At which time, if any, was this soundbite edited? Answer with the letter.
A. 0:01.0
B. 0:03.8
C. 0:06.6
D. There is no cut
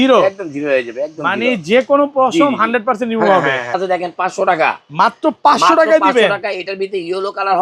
B